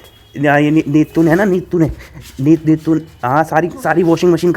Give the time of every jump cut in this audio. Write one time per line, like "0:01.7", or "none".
none